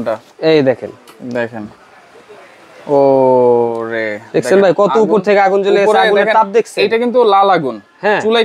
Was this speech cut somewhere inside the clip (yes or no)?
no